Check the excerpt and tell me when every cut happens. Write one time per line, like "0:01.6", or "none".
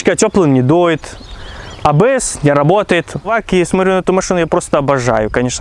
0:03.3

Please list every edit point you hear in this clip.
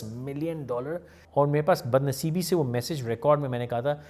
0:01.1

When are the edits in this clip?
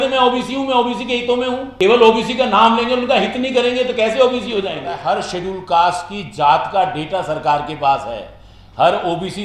0:01.7
0:04.9

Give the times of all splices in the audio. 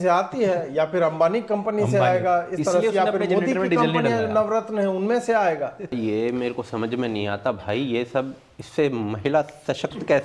0:06.0

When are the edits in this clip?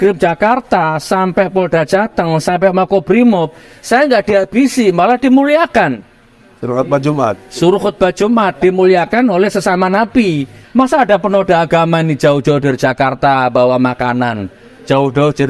0:10.6

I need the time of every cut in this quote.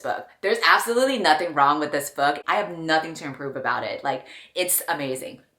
0:02.4

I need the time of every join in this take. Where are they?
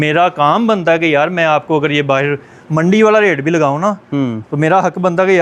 none

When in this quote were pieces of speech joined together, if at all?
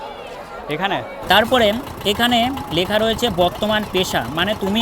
0:01.1

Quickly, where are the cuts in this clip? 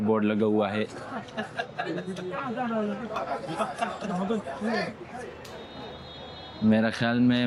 none

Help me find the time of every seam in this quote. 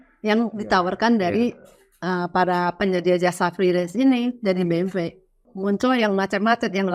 0:05.5

